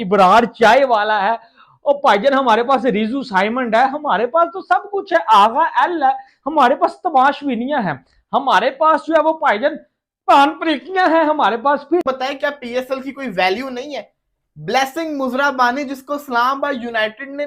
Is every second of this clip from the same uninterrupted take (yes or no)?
no